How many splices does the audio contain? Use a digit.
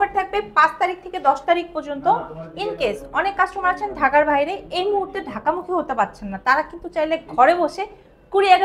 0